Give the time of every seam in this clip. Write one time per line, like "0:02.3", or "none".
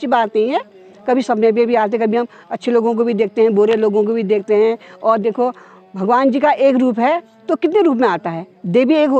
none